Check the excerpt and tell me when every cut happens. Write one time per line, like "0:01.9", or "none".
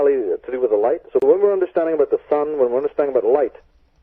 0:01.1